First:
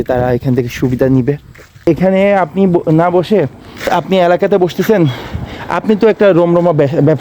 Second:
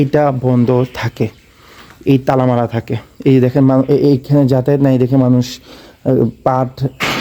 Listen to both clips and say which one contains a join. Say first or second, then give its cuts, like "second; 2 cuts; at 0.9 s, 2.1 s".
first; 2 cuts; at 1.7 s, 3.9 s